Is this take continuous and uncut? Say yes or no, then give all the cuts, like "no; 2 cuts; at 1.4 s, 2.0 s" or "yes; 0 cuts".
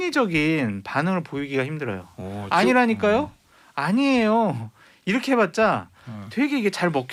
yes; 0 cuts